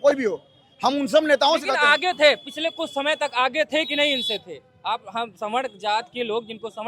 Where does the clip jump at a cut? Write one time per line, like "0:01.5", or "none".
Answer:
none